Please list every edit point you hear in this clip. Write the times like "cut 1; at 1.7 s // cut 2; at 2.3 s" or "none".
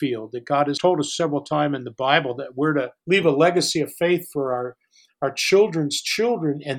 cut 1; at 0.8 s // cut 2; at 3.0 s